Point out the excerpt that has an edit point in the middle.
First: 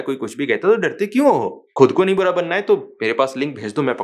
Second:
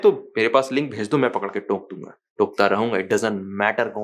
first; 1 cut; at 1.7 s

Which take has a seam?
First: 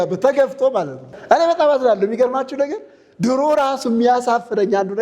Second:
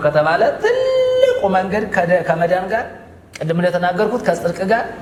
first; 1 cut; at 1.1 s

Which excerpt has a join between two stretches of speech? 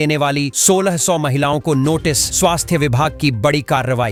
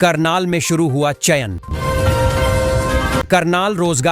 second; 2 cuts; at 1.7 s, 3.3 s

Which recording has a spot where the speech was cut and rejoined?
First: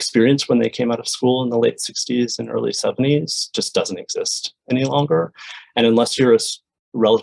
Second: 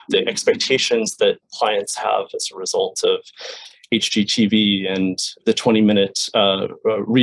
second; 2 cuts; at 1.4 s, 5.4 s

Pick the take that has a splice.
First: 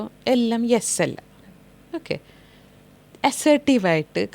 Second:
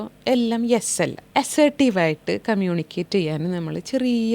second; 1 cut; at 1.2 s

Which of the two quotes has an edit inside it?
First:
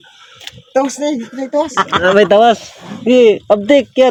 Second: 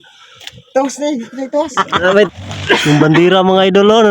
second; 1 cut; at 2.3 s

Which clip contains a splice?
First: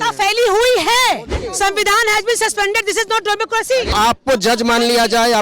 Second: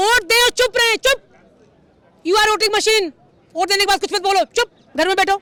first; 2 cuts; at 1.4 s, 3.9 s

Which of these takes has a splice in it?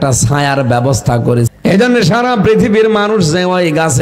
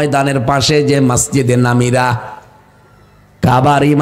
first; 1 cut; at 1.5 s

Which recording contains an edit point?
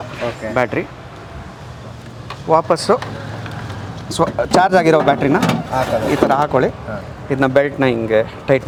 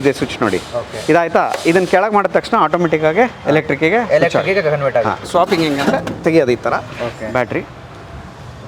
second; 1 cut; at 5.2 s

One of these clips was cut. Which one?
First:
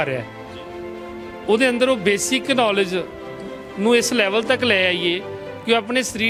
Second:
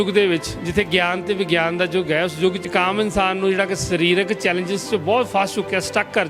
second; 1 cut; at 2.6 s

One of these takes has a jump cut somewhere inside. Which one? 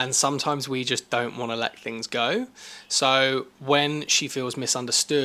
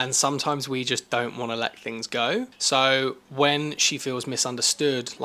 second; 1 cut; at 2.6 s

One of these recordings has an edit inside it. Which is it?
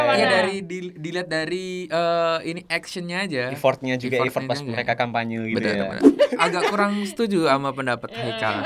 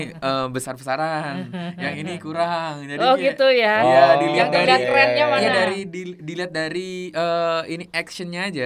first; 1 cut; at 6.1 s

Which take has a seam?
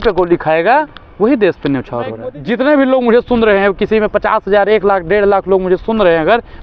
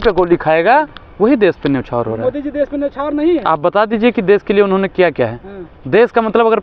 first; 1 cut; at 2.3 s

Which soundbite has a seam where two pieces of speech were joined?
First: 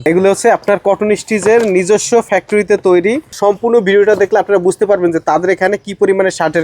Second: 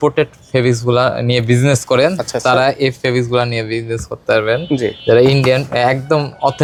first; 1 cut; at 3.3 s

